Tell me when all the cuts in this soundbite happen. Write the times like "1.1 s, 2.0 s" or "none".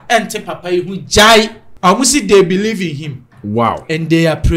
1.6 s